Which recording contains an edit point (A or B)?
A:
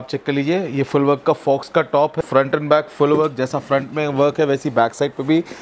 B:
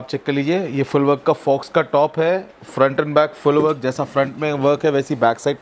A